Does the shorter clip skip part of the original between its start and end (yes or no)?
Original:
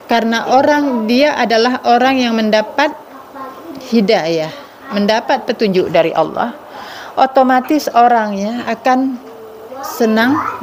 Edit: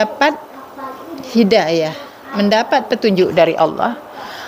no